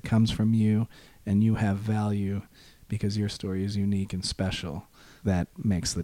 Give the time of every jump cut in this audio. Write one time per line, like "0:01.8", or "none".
0:05.1

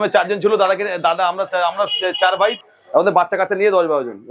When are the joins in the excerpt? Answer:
0:02.5

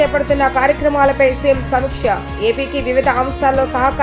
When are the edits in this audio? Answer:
none

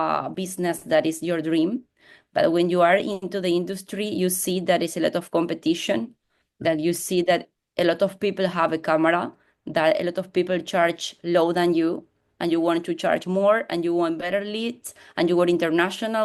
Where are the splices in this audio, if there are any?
none

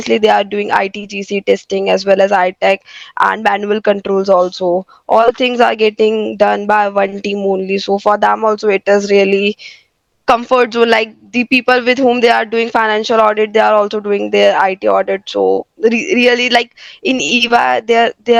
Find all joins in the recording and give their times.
none

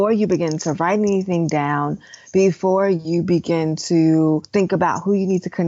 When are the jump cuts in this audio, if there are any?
0:04.5

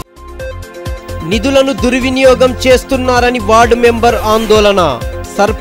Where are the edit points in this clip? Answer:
none

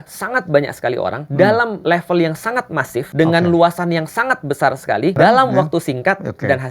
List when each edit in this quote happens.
0:01.2
0:01.8
0:03.1
0:05.1

